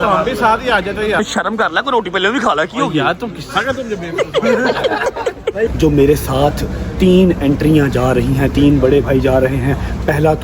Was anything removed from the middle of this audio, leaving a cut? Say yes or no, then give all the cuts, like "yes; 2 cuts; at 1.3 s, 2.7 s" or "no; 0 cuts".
yes; 2 cuts; at 1.2 s, 5.7 s